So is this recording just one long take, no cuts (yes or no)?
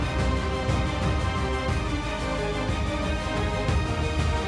yes